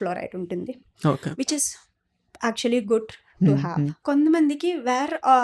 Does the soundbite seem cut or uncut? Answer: cut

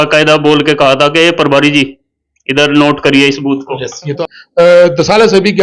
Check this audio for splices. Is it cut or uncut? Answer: cut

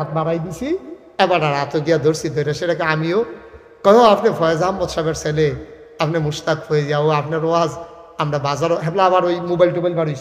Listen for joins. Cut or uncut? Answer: uncut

